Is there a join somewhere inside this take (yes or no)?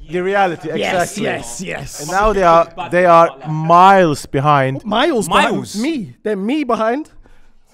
no